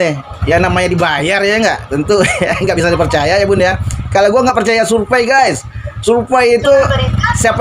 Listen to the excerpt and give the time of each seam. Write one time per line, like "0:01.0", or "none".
none